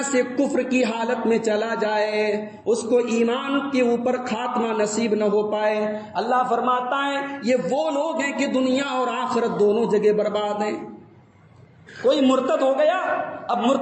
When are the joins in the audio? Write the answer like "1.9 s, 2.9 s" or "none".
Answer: none